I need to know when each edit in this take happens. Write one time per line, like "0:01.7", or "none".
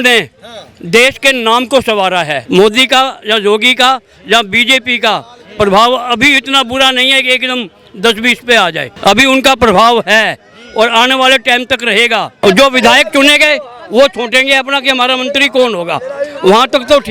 0:02.4
0:08.9
0:12.4